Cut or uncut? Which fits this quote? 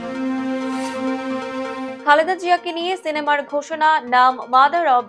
cut